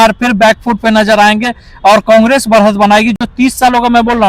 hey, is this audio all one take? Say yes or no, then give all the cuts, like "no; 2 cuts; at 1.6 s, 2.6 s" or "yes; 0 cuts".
yes; 0 cuts